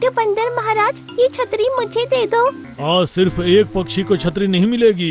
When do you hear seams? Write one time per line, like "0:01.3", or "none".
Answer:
0:02.7